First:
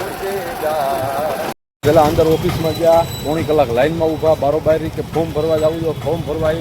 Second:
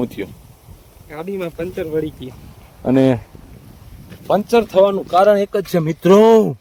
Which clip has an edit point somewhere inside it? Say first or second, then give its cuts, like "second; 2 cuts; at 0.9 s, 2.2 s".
first; 1 cut; at 1.5 s